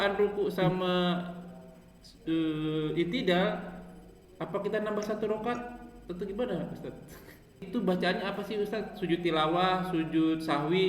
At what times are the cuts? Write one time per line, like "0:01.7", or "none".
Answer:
0:07.7